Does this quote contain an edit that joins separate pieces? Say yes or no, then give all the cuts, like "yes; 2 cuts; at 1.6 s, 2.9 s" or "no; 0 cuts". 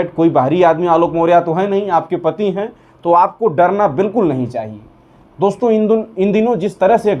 no; 0 cuts